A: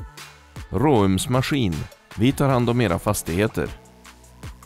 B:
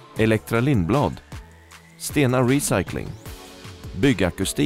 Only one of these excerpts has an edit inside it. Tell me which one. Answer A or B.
A